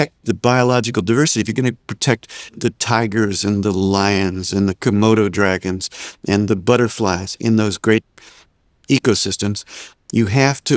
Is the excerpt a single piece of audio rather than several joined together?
no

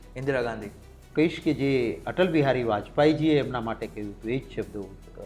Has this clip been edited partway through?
yes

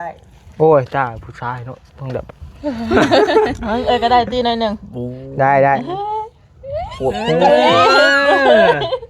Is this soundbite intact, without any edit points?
yes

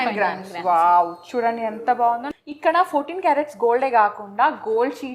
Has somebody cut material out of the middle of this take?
yes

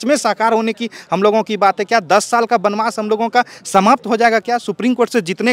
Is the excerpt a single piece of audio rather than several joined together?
yes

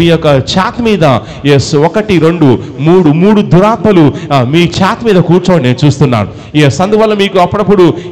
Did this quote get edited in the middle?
no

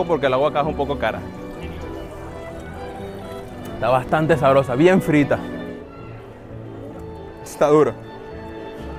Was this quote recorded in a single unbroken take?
yes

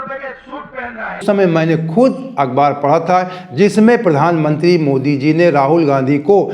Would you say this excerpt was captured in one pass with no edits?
no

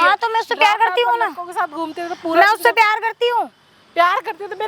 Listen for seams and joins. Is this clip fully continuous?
yes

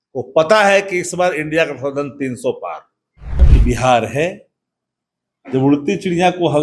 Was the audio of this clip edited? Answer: yes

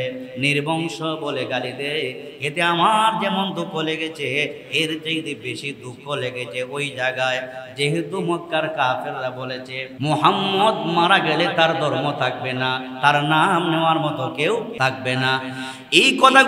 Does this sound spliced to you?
yes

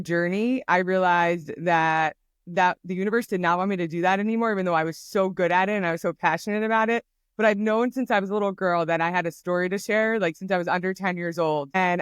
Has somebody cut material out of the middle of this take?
no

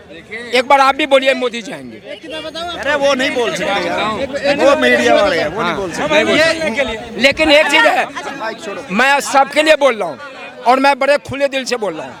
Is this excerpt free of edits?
yes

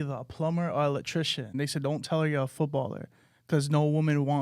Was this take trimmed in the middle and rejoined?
yes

